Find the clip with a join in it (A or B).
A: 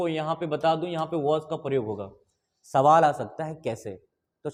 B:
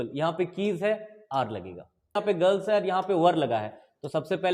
B